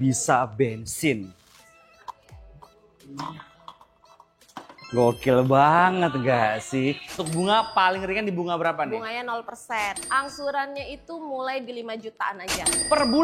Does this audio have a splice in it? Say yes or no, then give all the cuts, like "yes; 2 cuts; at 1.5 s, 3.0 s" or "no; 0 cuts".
yes; 2 cuts; at 7.2 s, 10.0 s